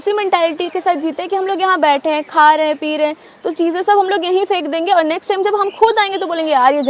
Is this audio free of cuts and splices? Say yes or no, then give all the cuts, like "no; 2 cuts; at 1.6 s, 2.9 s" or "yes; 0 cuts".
yes; 0 cuts